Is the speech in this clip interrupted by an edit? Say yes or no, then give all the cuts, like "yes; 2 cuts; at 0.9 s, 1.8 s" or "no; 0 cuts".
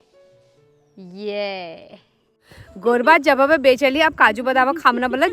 yes; 1 cut; at 2.3 s